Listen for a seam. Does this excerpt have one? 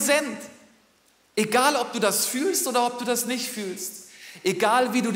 no; 0 cuts

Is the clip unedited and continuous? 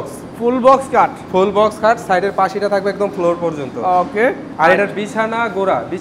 yes; 0 cuts

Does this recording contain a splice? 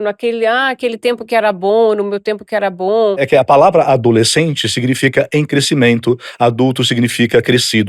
yes; 1 cut; at 3.2 s

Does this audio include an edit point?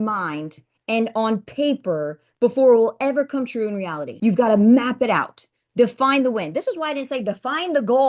yes; 1 cut; at 4.0 s

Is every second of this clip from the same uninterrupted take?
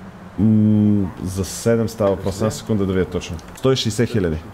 yes; 0 cuts

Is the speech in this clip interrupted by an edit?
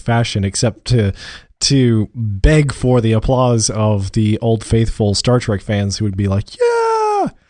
no; 0 cuts

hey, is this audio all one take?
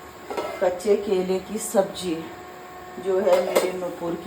yes; 0 cuts

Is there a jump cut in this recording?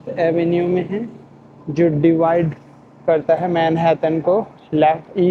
no; 0 cuts

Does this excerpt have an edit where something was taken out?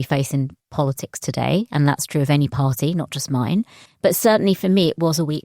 yes; 1 cut; at 3.9 s

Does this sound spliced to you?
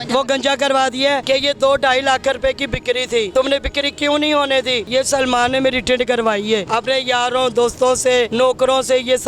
yes; 5 cuts; at 1.2 s, 3.3 s, 4.9 s, 6.7 s, 8.3 s

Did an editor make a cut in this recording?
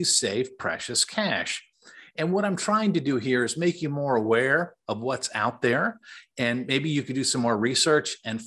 no; 0 cuts

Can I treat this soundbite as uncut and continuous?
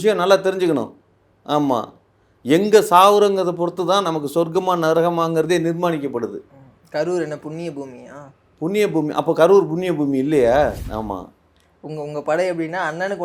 no; 1 cut; at 10.8 s

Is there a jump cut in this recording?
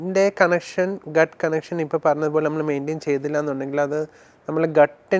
no; 0 cuts

